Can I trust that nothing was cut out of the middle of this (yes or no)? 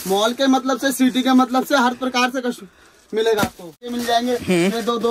no